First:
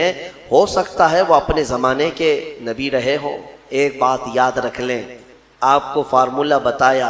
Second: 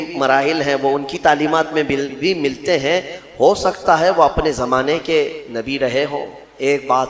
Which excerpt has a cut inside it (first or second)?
first